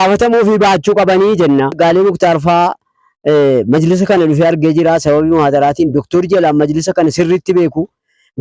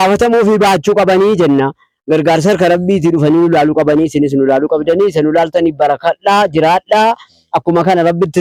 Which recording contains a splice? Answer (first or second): first